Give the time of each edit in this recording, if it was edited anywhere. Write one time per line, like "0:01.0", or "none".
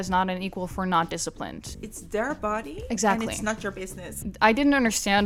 0:01.7
0:04.1